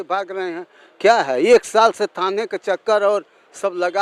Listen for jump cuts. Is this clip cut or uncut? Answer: uncut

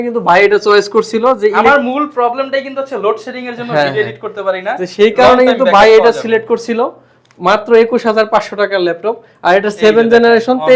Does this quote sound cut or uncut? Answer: uncut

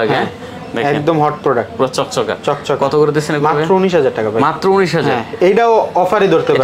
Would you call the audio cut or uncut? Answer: uncut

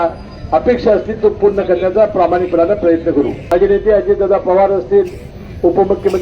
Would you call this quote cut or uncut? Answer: cut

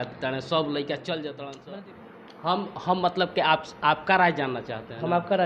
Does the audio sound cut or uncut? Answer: cut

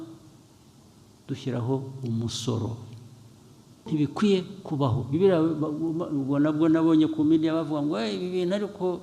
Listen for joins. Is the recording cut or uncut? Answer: cut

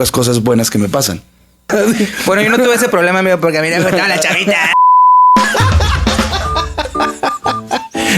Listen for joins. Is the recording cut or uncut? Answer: cut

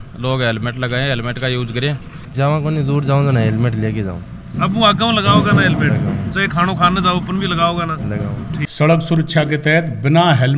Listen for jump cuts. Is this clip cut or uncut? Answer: cut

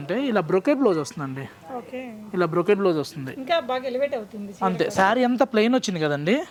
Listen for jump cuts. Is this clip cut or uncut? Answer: uncut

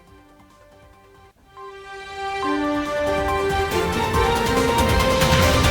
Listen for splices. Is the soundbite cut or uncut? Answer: cut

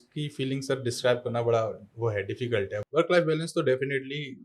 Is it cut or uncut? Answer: cut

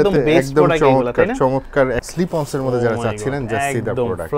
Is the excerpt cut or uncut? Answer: cut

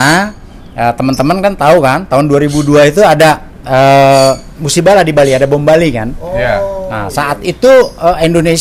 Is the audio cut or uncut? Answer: uncut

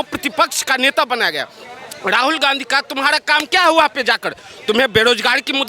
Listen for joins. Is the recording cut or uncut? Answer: uncut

